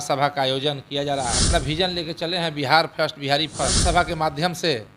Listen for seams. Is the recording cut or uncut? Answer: cut